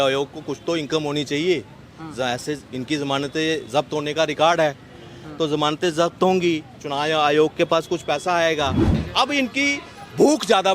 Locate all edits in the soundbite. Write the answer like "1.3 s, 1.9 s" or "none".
8.9 s